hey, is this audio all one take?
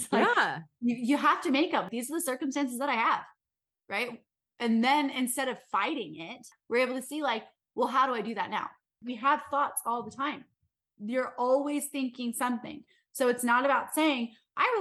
no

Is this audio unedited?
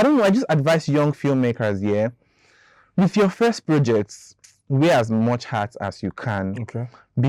yes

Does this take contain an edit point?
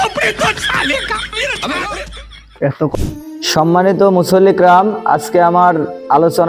yes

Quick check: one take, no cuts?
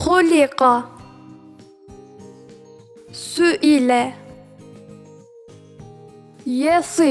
yes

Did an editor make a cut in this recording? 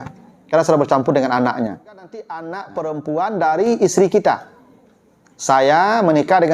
yes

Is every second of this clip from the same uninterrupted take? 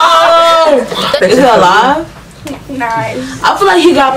no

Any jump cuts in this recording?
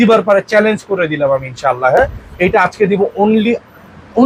no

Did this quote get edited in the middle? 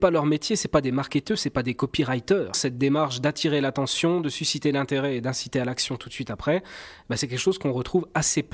yes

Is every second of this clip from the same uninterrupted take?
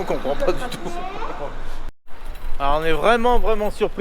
no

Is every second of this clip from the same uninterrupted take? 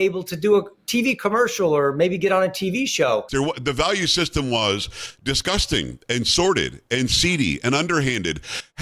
no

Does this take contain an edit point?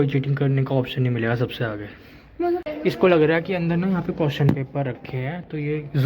yes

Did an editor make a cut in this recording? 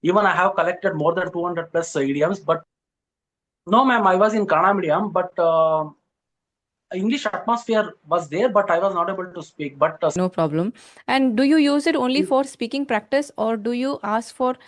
yes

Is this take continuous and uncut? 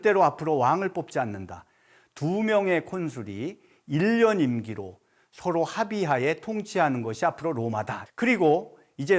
no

